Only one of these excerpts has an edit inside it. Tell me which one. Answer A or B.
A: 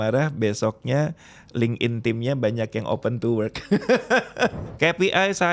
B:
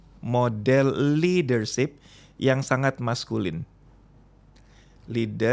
A